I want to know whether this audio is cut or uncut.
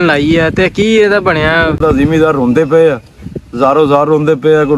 cut